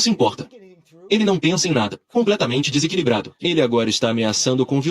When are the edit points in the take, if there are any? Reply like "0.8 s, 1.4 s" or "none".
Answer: 1.9 s, 3.3 s